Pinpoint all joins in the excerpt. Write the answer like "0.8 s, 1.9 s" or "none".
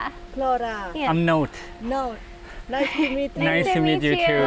none